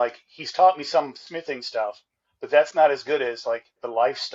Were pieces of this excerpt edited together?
no; 0 cuts

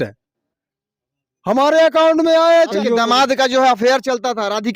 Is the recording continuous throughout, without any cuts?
no; 1 cut; at 2.7 s

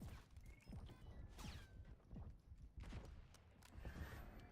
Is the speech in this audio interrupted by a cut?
yes; 1 cut; at 1.0 s

